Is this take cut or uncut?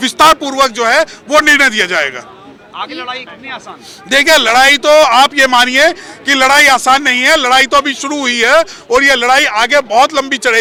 uncut